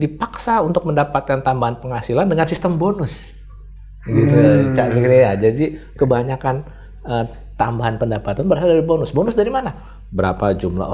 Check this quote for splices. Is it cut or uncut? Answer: uncut